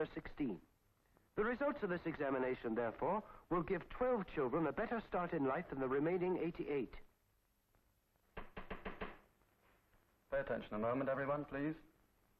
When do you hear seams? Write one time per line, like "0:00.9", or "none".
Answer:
0:09.2